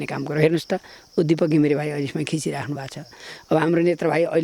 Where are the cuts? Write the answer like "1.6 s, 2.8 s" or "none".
none

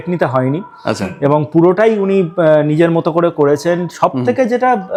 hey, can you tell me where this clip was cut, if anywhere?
none

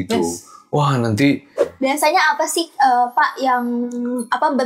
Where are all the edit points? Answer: 1.6 s

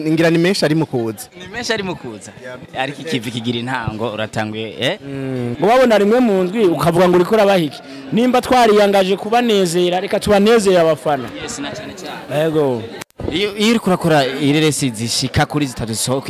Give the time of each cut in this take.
5.5 s

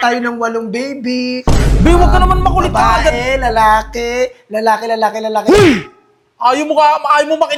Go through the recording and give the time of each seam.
none

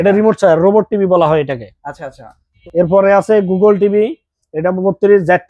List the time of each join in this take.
2.5 s

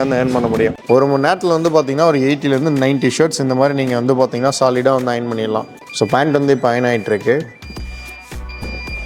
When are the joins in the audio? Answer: 0.8 s, 5.8 s

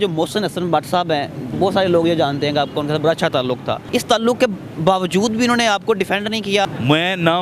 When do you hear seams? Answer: 1.4 s, 3.8 s, 6.6 s

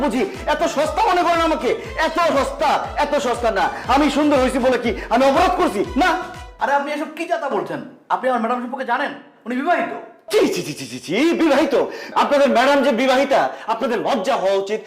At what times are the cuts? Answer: 3.8 s, 13.8 s

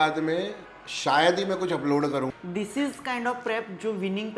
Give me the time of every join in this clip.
2.3 s

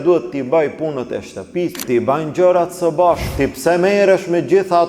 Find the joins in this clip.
1.7 s, 3.3 s

